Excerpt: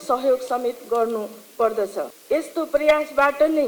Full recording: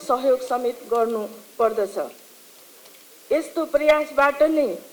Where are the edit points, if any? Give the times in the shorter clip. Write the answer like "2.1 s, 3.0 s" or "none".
2.2 s

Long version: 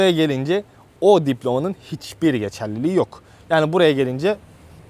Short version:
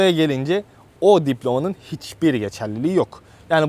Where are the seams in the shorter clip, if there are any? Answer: none

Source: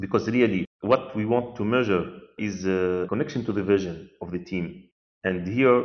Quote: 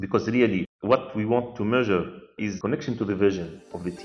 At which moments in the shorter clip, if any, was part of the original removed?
2.6 s

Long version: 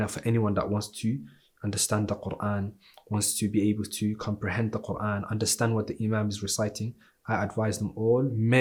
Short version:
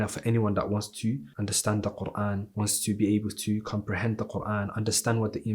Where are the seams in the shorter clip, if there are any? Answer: 1.3 s, 2.5 s

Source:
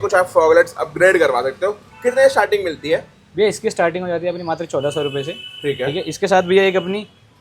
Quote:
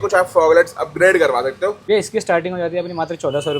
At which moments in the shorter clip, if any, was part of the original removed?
1.8 s

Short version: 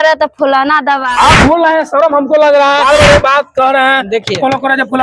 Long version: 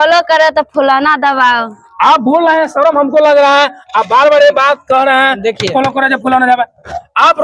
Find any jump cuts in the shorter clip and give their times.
1.1 s, 2.8 s

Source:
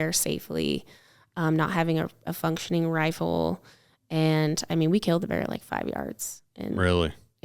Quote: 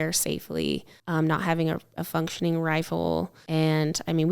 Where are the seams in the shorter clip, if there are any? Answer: 0.9 s, 3.4 s

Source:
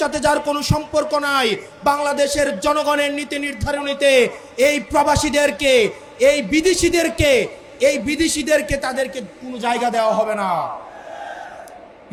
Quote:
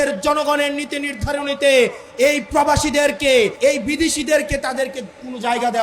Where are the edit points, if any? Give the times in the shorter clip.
3.5 s

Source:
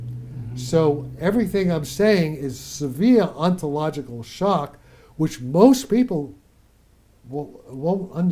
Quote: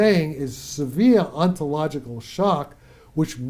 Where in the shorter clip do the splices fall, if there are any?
none

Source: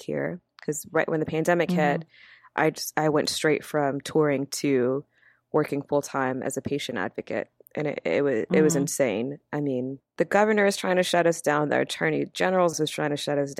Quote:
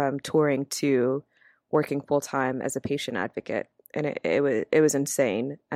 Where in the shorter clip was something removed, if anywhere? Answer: none

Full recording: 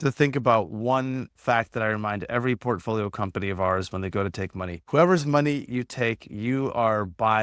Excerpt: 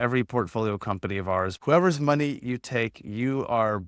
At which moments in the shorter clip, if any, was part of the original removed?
1.6 s

